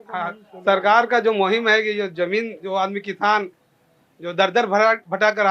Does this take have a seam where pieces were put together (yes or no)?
no